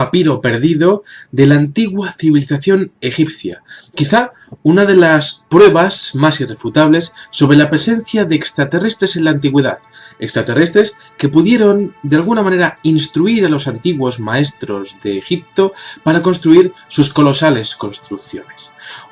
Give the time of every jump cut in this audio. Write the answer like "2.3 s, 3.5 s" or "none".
none